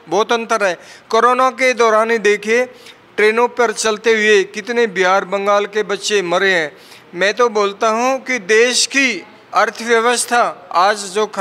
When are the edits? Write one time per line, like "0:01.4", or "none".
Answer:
none